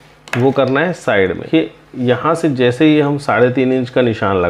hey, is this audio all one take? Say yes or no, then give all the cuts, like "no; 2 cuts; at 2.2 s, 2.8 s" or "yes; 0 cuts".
no; 1 cut; at 1.5 s